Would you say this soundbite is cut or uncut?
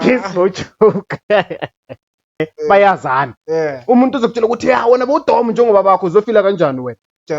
cut